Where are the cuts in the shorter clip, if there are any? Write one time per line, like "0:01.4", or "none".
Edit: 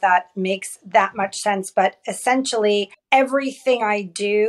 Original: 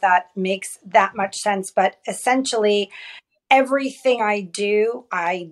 0:03.0